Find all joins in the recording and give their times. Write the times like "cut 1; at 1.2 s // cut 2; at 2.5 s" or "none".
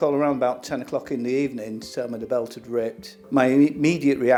none